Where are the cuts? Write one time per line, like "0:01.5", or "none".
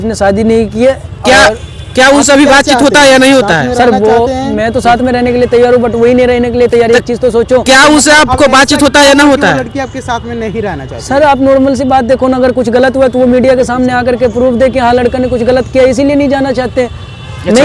none